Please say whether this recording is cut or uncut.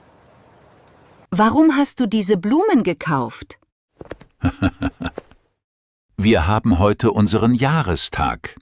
uncut